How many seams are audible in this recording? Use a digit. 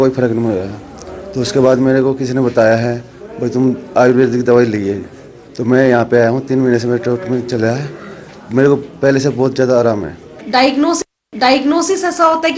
1